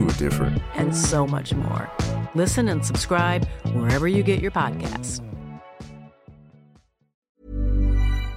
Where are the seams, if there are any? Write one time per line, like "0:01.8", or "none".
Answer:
0:07.2